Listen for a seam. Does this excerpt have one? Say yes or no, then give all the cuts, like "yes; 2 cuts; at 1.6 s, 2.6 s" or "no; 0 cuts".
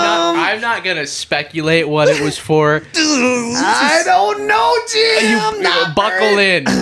no; 0 cuts